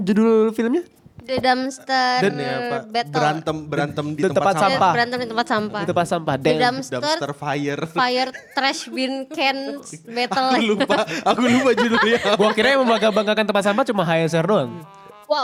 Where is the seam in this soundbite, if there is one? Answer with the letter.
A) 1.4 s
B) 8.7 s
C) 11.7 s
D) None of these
D